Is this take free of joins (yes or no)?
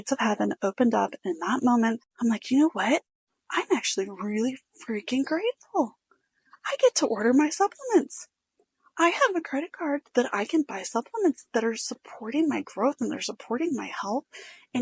yes